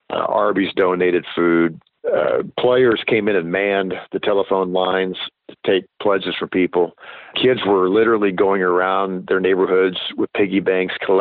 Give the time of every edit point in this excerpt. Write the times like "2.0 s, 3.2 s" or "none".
1.9 s, 7.3 s